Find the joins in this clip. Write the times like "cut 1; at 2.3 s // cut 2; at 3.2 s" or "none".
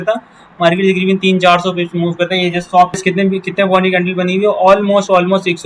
cut 1; at 3.0 s